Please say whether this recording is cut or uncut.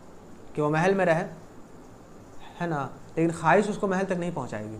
uncut